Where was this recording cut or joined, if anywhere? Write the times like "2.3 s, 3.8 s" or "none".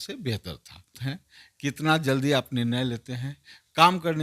1.0 s